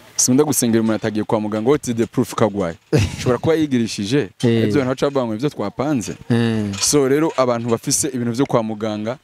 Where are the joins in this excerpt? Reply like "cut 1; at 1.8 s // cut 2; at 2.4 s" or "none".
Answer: none